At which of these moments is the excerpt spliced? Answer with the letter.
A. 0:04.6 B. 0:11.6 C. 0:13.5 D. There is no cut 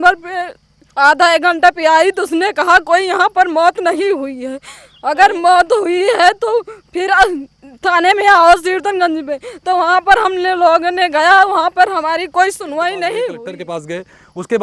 C